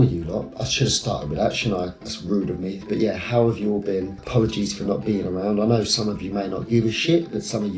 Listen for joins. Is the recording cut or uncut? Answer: uncut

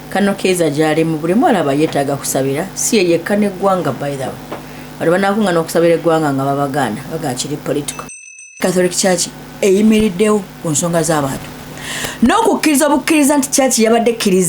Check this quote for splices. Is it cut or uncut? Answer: cut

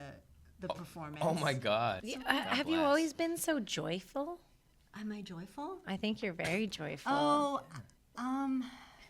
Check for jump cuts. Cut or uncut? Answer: cut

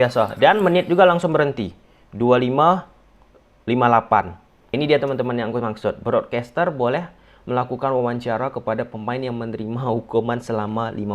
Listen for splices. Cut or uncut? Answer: cut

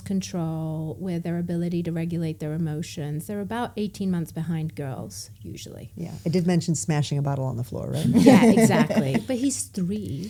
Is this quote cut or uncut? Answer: uncut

